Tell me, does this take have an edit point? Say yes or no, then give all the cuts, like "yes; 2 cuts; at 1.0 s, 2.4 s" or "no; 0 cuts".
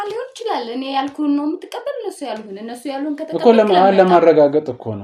no; 0 cuts